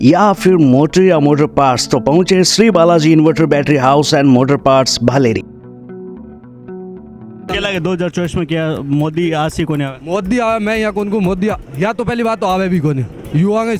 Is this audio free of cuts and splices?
no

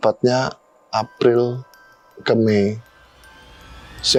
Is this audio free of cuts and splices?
yes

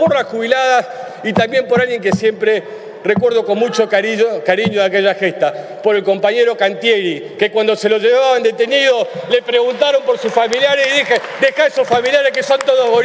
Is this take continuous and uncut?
yes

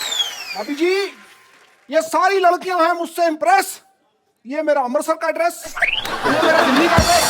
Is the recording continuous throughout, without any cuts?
yes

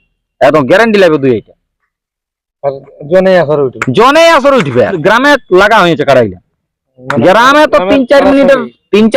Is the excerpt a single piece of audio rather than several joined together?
no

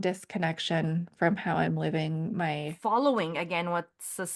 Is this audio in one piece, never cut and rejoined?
no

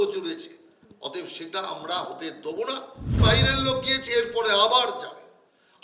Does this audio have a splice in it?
yes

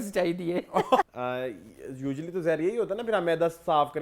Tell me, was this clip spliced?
yes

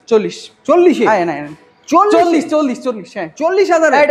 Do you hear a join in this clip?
no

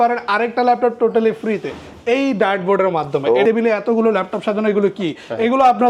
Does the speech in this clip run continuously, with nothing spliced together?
no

